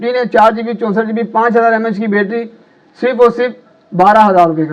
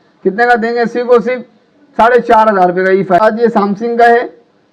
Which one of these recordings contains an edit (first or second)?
second